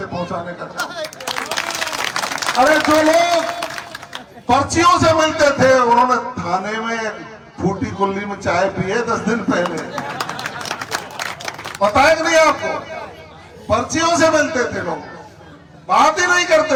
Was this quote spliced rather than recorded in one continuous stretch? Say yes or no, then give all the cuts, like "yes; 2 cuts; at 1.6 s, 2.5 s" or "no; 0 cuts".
no; 0 cuts